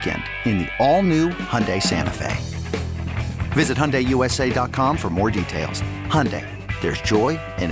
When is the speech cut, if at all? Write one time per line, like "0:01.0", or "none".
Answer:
none